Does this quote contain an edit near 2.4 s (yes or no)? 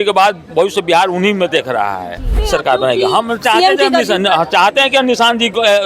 yes